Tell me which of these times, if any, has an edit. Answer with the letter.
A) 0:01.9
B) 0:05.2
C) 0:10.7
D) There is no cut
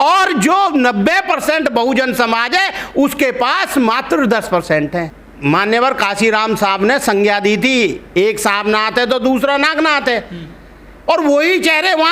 B